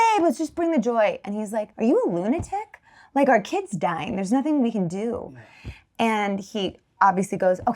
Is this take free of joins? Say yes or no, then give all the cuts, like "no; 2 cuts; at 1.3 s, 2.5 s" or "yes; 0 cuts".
no; 1 cut; at 1.7 s